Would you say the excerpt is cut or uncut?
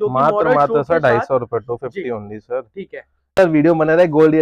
cut